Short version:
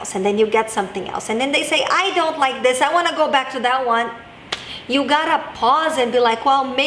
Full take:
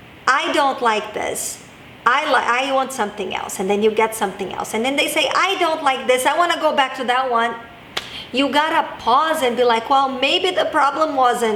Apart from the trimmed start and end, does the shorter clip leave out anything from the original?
no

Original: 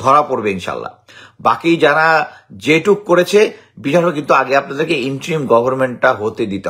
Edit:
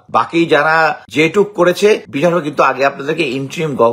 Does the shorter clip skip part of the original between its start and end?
yes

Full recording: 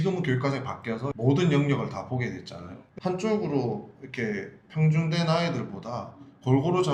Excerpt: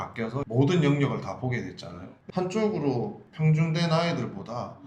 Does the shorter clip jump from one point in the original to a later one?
yes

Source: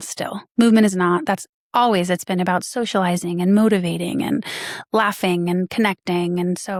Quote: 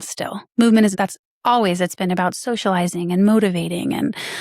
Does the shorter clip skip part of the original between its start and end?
yes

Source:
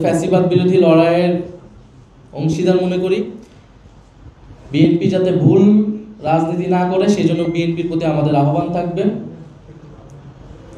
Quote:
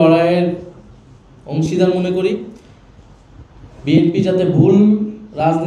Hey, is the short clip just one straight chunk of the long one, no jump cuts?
yes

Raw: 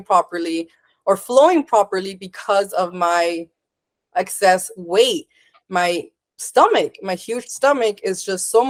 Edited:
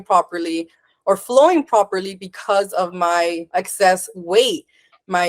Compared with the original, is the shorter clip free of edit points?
no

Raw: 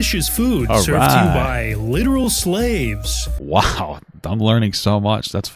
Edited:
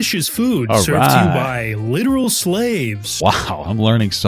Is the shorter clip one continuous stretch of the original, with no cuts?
no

